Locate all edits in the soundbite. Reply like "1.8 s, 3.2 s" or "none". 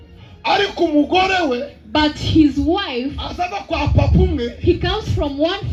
none